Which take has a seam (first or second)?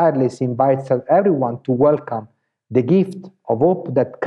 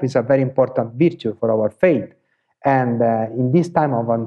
second